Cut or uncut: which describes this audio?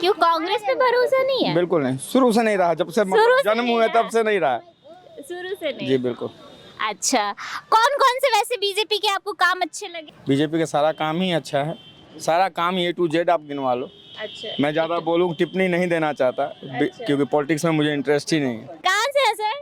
uncut